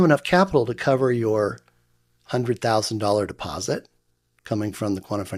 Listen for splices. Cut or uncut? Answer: uncut